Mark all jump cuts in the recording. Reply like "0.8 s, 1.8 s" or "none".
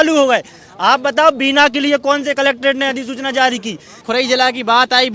4.0 s